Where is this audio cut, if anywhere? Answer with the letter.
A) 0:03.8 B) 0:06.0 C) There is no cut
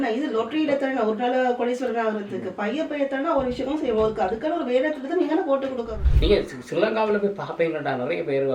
B